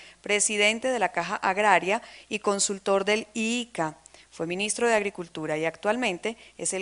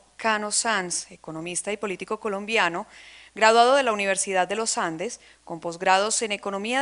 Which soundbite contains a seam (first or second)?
first